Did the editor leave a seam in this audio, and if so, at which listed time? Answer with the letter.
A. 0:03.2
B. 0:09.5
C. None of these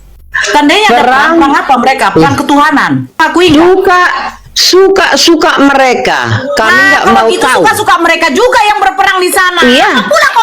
A